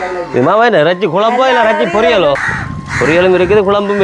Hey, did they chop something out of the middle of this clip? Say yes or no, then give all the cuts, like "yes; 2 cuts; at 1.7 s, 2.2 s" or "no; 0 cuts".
yes; 1 cut; at 2.4 s